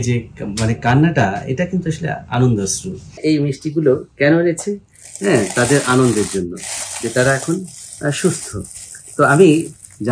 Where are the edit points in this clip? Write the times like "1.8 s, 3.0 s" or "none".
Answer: 3.2 s